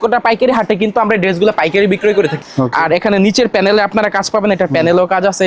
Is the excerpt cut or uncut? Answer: cut